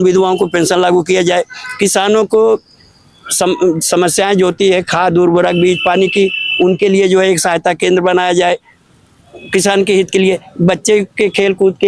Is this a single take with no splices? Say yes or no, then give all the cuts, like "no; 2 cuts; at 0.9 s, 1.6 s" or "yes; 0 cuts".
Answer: yes; 0 cuts